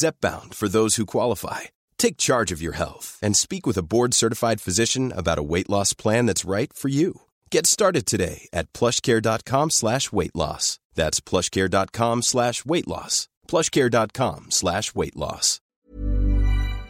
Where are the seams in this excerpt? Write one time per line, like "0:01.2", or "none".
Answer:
0:15.8